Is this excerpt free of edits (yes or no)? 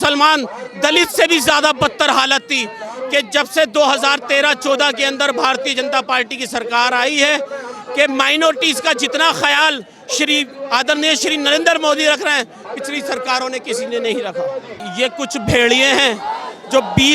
no